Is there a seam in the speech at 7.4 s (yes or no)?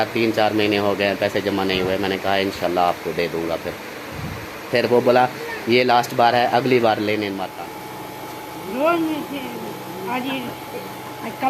yes